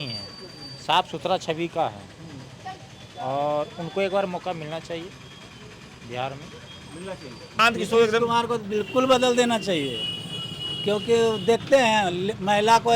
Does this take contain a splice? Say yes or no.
yes